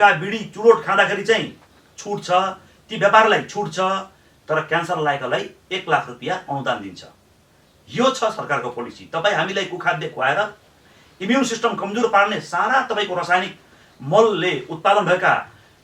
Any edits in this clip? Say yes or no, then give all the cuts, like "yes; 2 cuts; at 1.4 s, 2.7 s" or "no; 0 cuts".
no; 0 cuts